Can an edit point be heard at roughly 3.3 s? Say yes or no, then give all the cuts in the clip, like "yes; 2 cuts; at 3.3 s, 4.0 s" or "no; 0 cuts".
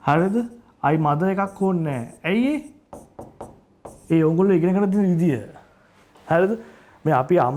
no; 0 cuts